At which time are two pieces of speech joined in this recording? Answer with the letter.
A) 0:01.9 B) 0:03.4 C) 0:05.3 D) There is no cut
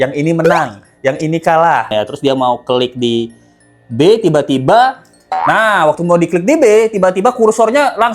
A